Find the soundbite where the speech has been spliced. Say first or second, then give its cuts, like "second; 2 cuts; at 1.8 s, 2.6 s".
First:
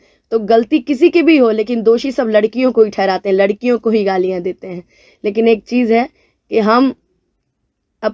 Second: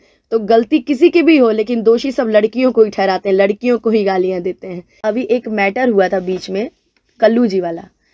second; 1 cut; at 4.9 s